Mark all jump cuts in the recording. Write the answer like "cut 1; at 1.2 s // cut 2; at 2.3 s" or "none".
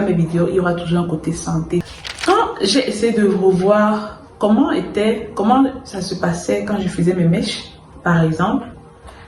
cut 1; at 1.8 s